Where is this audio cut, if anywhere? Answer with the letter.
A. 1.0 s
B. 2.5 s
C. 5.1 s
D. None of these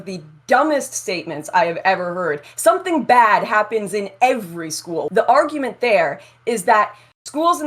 C